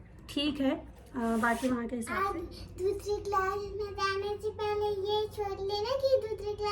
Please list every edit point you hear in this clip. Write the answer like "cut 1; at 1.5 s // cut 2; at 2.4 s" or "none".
cut 1; at 2.1 s